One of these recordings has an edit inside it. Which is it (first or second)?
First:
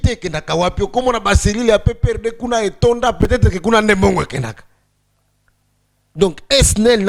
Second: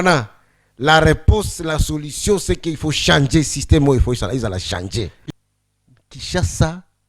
second